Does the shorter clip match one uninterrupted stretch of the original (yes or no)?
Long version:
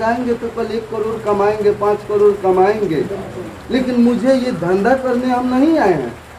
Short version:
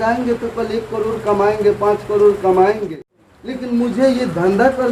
no